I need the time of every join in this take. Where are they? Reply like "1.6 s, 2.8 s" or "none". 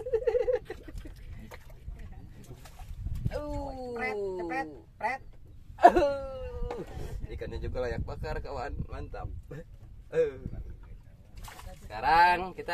11.4 s

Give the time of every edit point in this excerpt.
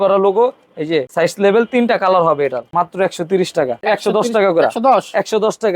1.1 s, 2.6 s, 3.8 s

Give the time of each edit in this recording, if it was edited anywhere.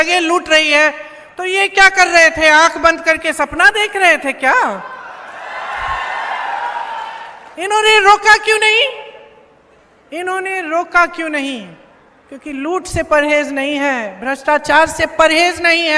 none

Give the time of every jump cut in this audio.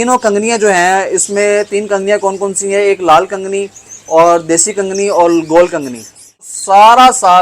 6.5 s

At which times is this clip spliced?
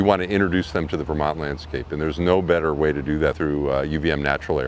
3.4 s

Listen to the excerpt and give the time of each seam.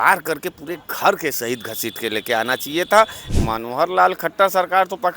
3.2 s

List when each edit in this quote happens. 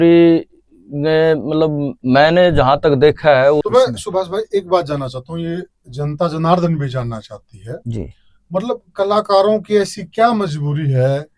3.6 s

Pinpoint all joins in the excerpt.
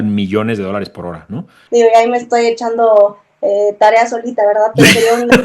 1.6 s

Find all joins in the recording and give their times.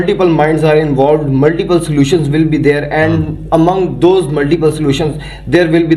none

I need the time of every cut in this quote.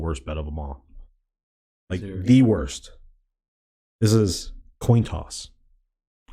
none

